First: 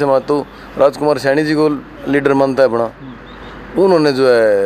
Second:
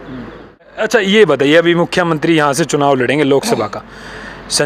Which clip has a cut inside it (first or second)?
second